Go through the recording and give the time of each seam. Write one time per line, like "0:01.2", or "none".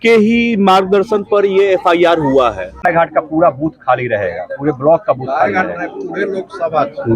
0:02.7